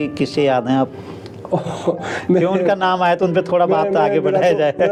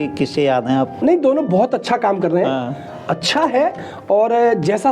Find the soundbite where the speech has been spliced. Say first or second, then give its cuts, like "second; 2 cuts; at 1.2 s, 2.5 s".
second; 1 cut; at 1.0 s